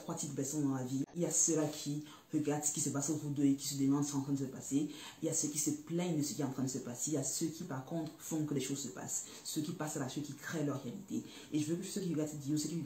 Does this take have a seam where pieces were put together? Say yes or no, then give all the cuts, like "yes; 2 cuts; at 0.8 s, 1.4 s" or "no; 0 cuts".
yes; 1 cut; at 1.0 s